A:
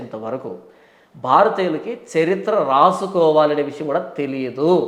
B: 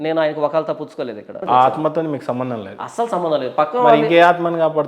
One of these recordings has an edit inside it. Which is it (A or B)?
B